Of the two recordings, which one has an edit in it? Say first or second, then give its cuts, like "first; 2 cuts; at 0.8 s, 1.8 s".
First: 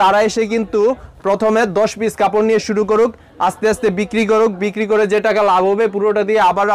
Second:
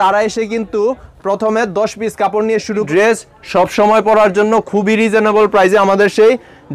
second; 1 cut; at 2.9 s